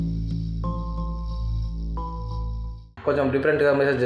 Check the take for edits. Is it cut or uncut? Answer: cut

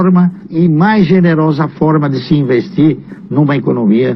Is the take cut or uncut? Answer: uncut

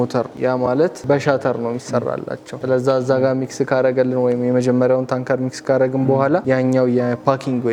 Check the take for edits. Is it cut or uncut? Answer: uncut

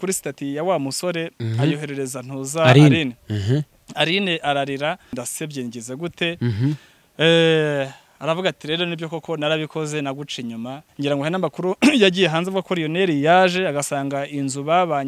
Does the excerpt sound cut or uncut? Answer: cut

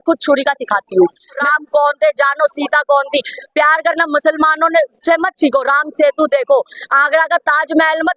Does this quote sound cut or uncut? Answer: cut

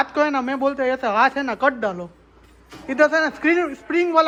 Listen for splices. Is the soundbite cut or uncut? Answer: uncut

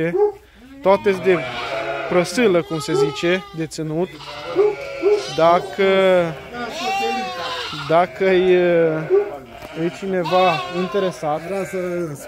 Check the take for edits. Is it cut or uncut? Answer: uncut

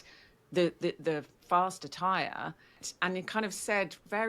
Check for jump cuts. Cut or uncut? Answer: cut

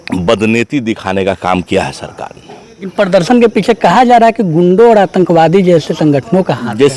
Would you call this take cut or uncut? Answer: cut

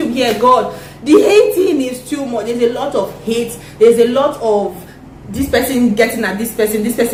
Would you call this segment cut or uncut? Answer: uncut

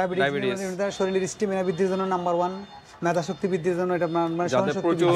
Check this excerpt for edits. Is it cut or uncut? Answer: uncut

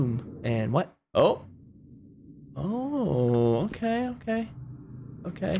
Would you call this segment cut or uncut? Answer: uncut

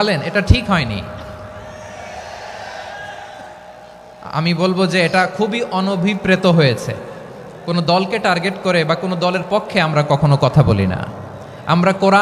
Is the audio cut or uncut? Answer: uncut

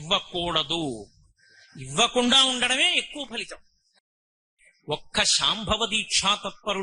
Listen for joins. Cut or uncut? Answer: cut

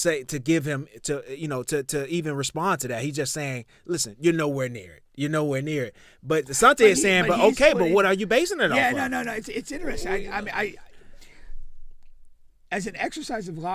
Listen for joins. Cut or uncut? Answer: uncut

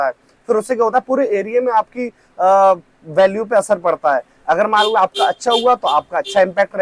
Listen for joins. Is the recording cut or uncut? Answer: uncut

